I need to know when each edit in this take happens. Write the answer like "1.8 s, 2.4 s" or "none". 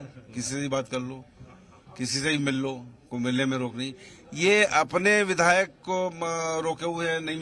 none